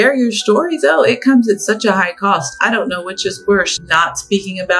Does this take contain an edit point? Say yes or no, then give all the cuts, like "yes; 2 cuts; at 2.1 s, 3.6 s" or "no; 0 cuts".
yes; 1 cut; at 3.8 s